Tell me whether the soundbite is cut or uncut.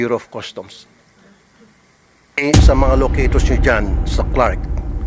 cut